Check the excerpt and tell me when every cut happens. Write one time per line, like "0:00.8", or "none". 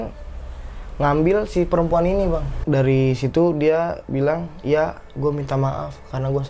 0:02.5

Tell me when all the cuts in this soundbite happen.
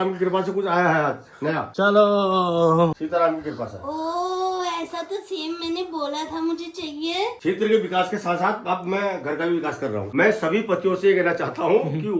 0:01.7
0:03.0
0:07.3
0:10.1

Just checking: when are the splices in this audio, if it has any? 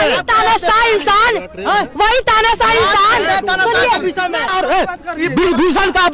0:04.5

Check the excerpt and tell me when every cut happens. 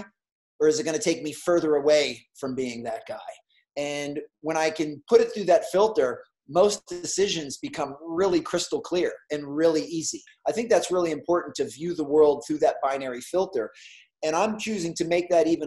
0:10.3

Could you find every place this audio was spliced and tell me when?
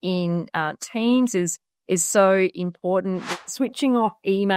0:03.3

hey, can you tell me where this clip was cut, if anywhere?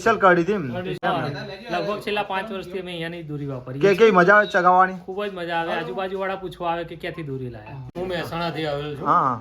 0:01.0
0:07.9

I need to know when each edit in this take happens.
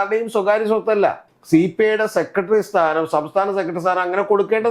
0:01.2

